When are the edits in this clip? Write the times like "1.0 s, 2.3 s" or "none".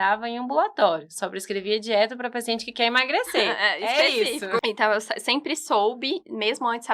4.6 s